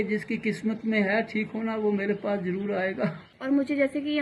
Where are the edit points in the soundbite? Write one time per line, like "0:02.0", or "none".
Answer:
0:03.3